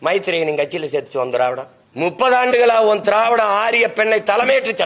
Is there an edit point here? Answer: yes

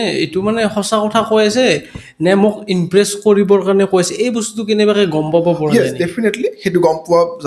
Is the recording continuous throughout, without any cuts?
yes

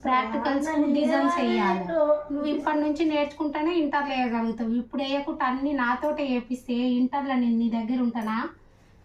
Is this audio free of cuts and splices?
yes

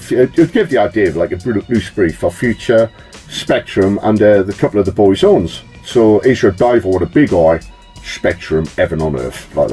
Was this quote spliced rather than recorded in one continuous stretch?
no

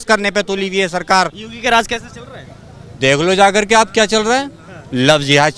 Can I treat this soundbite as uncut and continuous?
no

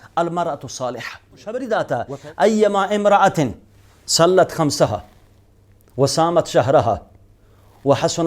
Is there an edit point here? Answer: yes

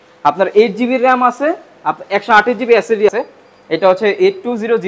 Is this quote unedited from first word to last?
no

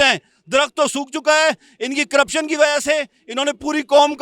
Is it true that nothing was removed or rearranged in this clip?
yes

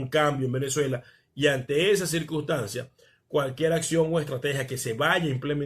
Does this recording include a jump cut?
no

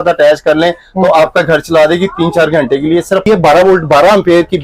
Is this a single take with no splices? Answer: no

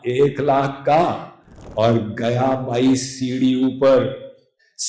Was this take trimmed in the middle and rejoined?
no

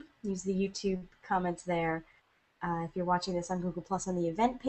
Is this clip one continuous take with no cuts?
yes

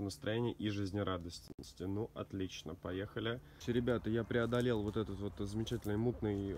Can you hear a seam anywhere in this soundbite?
yes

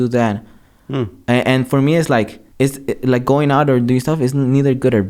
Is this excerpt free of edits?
no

